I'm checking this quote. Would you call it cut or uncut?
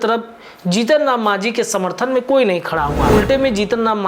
cut